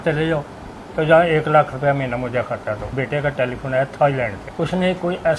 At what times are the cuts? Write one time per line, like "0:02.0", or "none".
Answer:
0:02.9
0:04.4

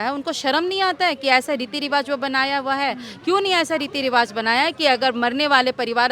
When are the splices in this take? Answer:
none

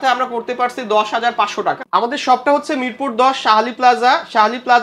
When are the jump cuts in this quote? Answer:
0:01.8

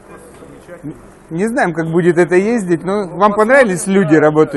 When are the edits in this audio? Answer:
none

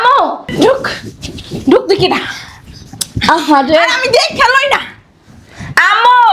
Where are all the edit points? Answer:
none

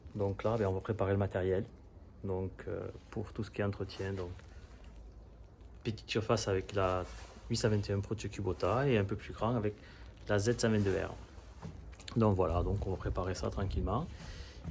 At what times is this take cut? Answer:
none

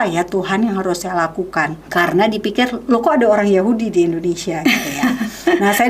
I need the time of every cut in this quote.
0:01.8

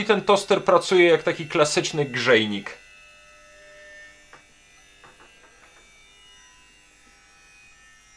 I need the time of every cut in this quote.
none

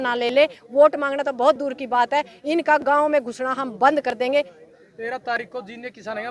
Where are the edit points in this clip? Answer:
none

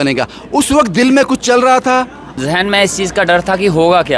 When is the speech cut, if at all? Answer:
0:02.4

